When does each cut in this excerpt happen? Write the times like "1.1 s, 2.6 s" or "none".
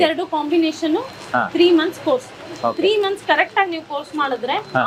none

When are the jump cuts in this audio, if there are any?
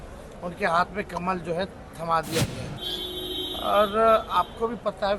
2.7 s

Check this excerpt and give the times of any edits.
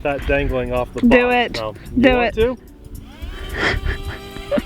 2.6 s

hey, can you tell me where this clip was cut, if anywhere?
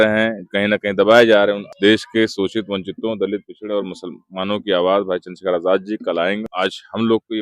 1.7 s, 6.5 s

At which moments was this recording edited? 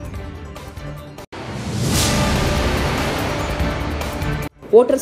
none

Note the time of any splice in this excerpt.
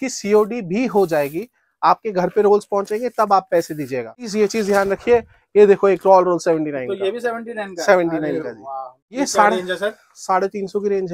4.2 s, 9.0 s

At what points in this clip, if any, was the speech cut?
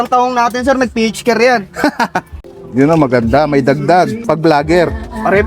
4.2 s

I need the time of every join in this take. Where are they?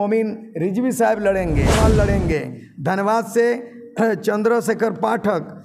1.8 s

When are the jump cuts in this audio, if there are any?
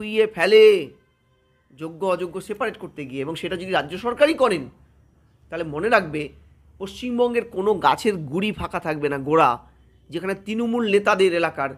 none

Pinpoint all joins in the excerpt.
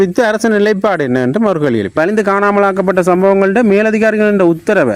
2.0 s

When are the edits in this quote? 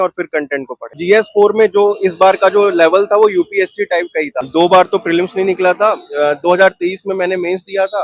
1.0 s, 4.5 s

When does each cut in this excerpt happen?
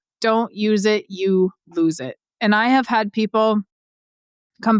none

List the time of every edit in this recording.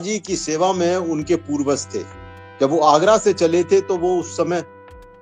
none

